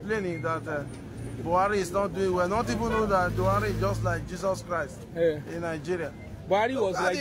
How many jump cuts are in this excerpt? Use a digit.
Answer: 0